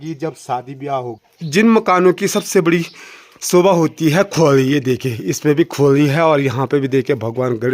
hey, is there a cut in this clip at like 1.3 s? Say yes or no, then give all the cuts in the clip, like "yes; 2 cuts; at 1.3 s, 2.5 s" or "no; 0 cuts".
yes; 1 cut; at 1.3 s